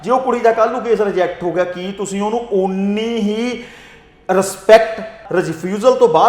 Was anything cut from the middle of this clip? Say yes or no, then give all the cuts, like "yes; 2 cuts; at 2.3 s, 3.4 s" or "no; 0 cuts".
yes; 1 cut; at 5.2 s